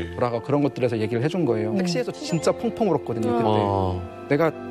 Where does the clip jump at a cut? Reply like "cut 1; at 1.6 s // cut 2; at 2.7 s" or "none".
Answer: cut 1; at 2.1 s